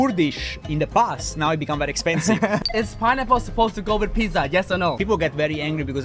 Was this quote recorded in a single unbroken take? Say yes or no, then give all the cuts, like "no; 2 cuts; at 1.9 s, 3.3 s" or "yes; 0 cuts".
no; 2 cuts; at 2.6 s, 5.0 s